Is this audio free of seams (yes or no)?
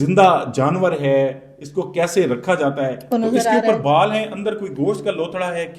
no